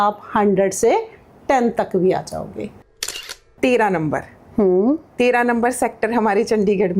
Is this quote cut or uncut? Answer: cut